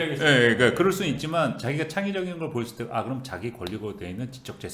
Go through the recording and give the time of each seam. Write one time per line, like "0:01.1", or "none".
none